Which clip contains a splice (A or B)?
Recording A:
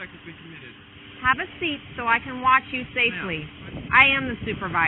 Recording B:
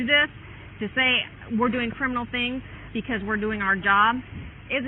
A